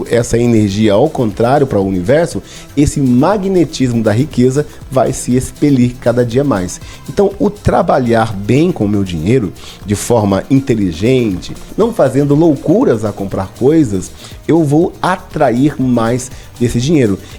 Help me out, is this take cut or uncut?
uncut